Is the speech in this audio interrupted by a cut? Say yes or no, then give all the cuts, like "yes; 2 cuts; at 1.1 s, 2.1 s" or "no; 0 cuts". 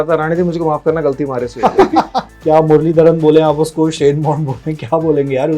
yes; 1 cut; at 2.2 s